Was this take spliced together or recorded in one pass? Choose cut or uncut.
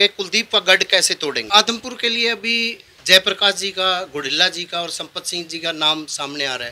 cut